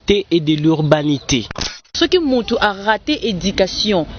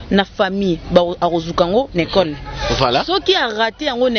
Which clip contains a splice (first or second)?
first